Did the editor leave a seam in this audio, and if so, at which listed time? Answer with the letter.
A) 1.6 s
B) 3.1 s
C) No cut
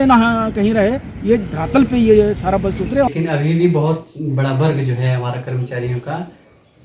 B